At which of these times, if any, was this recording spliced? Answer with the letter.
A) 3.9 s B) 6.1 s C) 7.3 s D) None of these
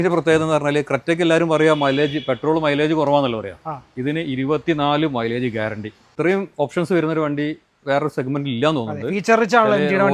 B